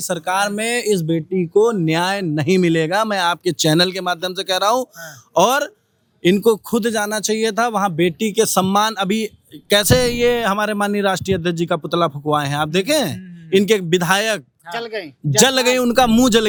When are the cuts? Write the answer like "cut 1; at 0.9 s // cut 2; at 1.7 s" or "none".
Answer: none